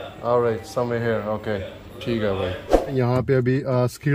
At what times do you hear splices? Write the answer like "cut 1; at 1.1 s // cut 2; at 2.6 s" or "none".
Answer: cut 1; at 2.8 s